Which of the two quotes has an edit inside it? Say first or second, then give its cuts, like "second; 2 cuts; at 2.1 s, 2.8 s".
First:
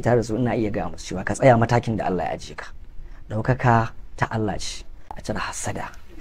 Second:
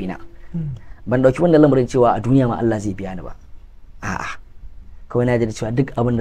first; 1 cut; at 5.2 s